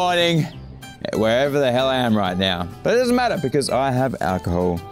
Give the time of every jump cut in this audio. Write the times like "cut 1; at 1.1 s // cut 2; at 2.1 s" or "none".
none